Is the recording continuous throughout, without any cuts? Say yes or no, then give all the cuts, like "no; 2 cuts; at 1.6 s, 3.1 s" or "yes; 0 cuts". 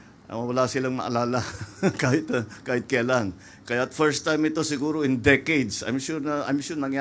yes; 0 cuts